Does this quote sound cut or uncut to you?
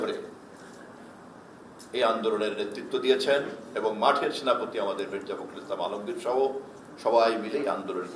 uncut